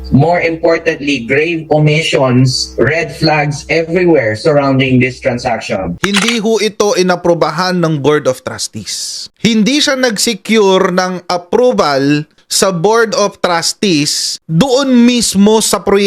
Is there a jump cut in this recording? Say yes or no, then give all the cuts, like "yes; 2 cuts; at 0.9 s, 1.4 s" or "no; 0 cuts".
yes; 1 cut; at 6.0 s